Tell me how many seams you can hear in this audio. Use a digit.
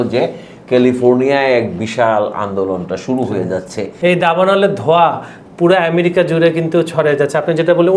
1